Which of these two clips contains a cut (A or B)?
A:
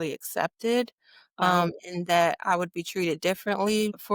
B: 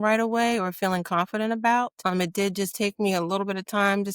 B